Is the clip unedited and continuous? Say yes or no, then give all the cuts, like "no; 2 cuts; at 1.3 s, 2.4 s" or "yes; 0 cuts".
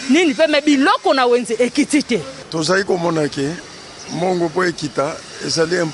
no; 1 cut; at 2.4 s